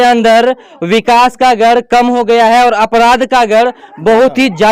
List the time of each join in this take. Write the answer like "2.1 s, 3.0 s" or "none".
none